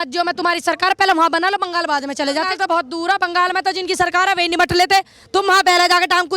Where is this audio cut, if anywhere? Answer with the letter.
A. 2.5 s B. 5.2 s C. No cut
A